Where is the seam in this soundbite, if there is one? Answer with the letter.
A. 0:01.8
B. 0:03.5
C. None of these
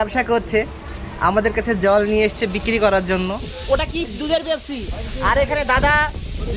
B